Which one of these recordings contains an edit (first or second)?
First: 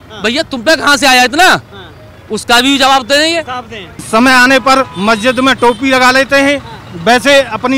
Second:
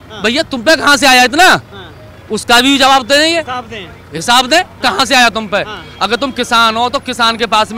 first